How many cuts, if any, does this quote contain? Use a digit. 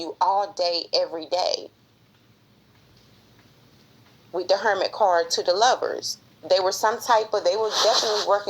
1